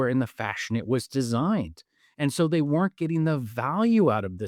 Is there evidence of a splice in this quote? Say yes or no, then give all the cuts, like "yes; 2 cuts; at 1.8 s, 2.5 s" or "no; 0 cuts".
no; 0 cuts